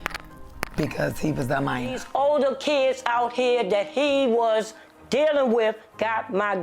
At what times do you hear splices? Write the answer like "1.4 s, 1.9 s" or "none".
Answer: 2.0 s